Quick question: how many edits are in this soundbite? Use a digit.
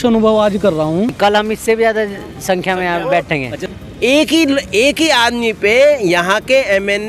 2